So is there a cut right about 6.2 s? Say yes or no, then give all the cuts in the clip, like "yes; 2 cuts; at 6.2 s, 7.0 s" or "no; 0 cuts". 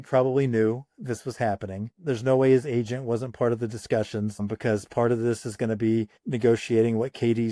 yes; 3 cuts; at 1.9 s, 4.4 s, 6.2 s